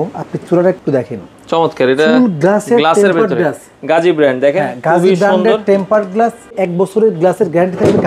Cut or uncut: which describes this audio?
cut